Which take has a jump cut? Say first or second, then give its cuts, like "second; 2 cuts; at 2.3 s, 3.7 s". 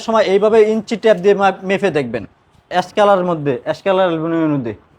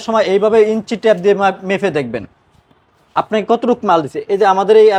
first; 1 cut; at 2.7 s